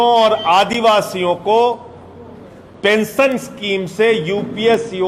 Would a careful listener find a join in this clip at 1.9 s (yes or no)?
no